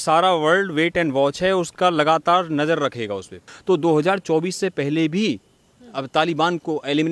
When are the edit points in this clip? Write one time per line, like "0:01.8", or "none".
0:03.5

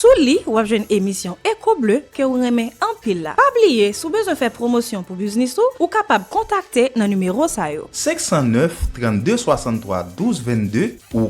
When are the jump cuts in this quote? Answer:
none

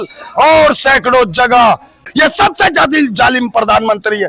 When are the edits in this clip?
0:02.0

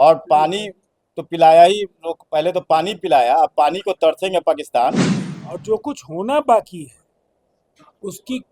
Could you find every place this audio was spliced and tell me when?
0:05.1

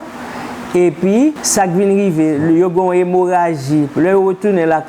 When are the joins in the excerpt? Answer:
0:01.4

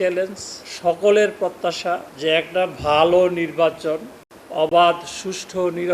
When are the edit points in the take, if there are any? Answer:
none

